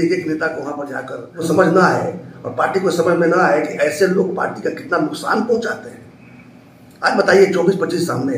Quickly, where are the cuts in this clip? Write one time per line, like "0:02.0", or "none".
0:01.4